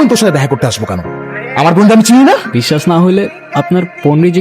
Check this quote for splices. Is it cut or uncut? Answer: cut